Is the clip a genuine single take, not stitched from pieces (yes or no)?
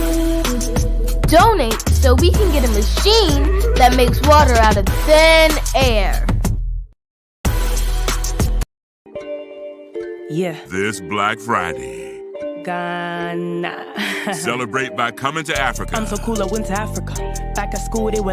no